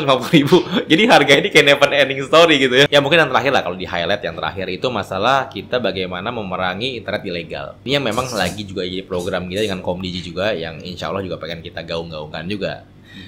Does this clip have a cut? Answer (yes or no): yes